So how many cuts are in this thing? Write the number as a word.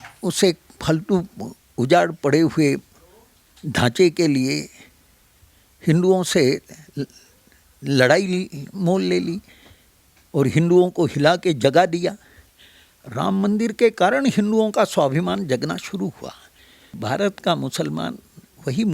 one